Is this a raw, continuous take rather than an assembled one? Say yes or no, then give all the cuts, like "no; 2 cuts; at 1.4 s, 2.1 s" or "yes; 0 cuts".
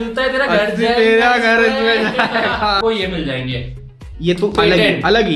no; 1 cut; at 2.8 s